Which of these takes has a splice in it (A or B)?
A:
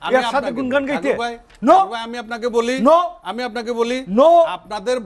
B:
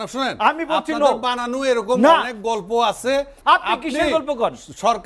B